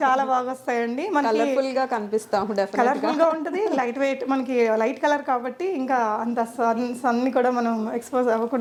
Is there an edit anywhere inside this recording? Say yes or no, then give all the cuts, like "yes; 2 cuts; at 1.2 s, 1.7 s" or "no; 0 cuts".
no; 0 cuts